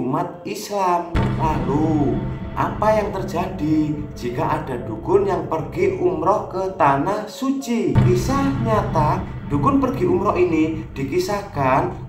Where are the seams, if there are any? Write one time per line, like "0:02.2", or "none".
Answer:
0:08.0